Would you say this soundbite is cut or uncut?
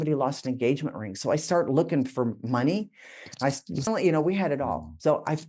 cut